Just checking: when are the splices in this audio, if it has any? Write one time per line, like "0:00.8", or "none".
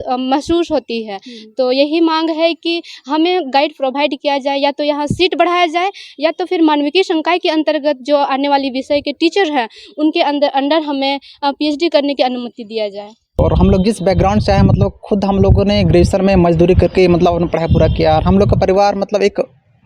0:13.4